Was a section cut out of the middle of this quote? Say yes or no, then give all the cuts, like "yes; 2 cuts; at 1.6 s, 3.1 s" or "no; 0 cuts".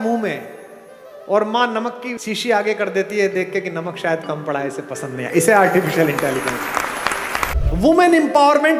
yes; 1 cut; at 7.5 s